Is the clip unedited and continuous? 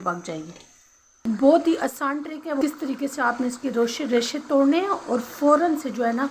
no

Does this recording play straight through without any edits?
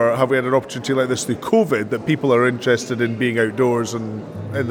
yes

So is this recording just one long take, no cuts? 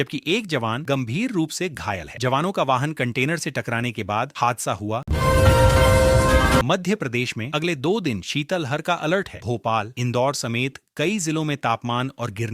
no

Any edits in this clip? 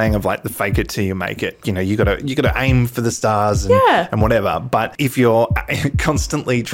yes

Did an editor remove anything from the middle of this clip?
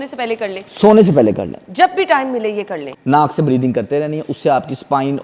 no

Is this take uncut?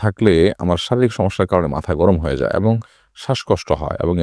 yes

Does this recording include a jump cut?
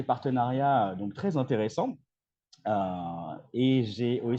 no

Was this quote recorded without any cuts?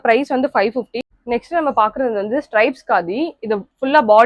no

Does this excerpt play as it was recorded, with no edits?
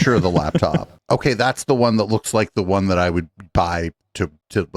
yes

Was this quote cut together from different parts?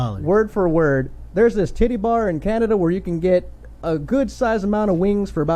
no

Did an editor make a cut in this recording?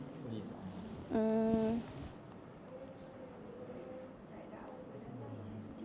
no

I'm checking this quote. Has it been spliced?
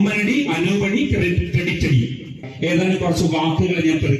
yes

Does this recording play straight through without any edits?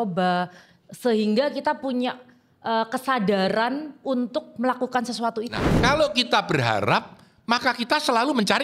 no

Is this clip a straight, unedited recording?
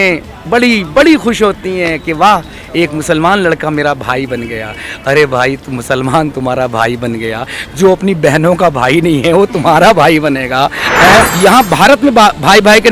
no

